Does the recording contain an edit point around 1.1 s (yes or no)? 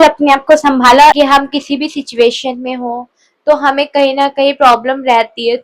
yes